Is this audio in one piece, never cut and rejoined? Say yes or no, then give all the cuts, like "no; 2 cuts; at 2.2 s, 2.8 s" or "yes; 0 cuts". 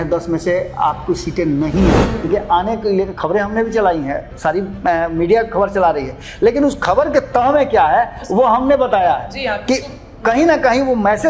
no; 1 cut; at 2.2 s